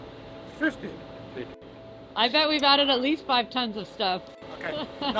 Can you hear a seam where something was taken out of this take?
no; 0 cuts

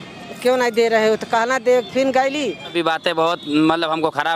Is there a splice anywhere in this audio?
yes; 1 cut; at 2.7 s

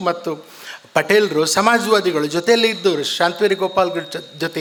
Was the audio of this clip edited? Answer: no; 0 cuts

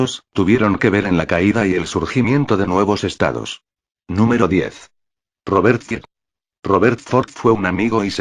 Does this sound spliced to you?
no; 0 cuts

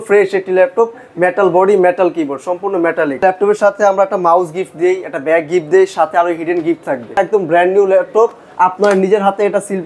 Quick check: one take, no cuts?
no; 2 cuts; at 3.2 s, 7.1 s

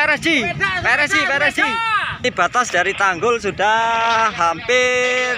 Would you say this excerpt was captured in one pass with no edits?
no; 1 cut; at 2.2 s

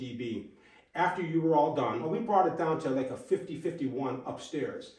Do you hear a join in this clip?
yes; 1 cut; at 2.1 s

